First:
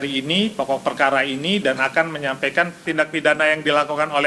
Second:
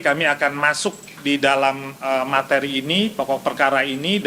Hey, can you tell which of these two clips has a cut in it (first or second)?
first